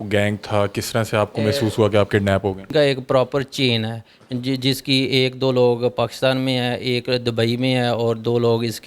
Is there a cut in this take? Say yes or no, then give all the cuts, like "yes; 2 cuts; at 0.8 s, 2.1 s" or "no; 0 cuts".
yes; 1 cut; at 2.7 s